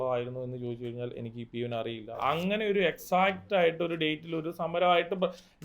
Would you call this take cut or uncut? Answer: cut